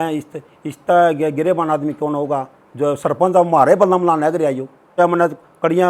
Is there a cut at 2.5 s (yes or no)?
no